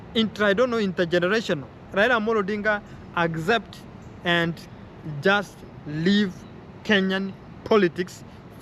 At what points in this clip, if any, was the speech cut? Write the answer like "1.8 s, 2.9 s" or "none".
1.8 s